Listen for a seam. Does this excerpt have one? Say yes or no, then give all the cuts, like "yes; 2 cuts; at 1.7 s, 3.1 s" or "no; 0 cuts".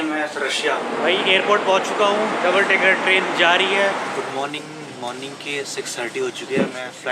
yes; 3 cuts; at 0.8 s, 2.3 s, 4.1 s